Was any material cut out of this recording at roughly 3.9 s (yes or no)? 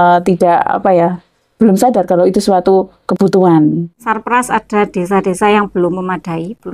yes